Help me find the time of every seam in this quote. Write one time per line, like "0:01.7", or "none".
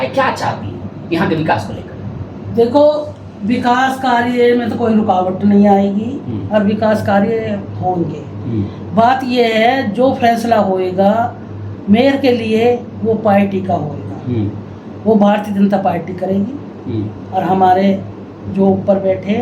none